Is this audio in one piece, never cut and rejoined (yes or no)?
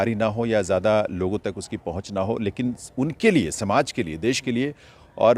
yes